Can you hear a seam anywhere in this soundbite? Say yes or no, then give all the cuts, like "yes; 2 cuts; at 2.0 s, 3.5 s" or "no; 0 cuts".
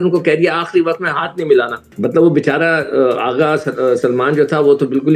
no; 0 cuts